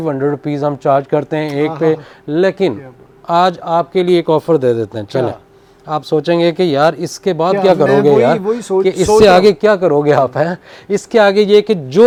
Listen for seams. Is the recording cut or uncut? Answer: uncut